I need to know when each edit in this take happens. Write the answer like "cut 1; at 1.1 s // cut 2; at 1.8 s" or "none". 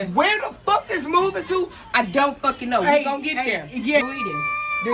cut 1; at 4.0 s